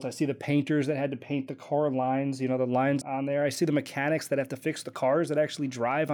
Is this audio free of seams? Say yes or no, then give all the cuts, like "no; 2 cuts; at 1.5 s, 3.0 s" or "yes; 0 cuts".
no; 1 cut; at 3.0 s